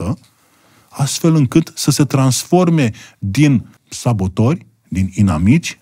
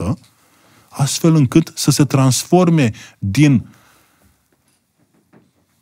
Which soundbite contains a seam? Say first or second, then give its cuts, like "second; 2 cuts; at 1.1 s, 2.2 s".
first; 1 cut; at 3.8 s